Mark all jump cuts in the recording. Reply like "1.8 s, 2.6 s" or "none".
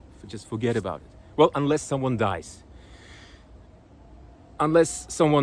none